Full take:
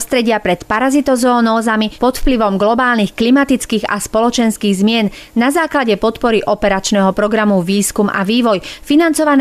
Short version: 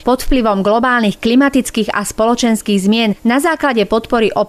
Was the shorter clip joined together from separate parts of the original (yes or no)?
yes